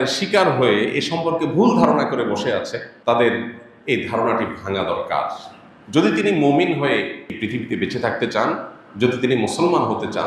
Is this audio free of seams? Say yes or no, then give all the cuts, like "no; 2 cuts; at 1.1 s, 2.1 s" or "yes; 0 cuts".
no; 2 cuts; at 2.9 s, 7.3 s